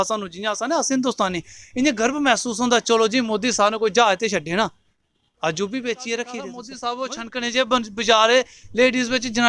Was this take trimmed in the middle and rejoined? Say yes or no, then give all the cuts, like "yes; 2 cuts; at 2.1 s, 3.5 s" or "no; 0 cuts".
yes; 1 cut; at 6.7 s